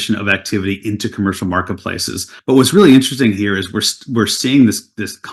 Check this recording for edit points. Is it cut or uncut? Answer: uncut